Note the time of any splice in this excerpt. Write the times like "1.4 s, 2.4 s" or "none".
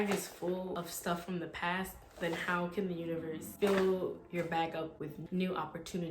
0.8 s, 3.5 s, 5.2 s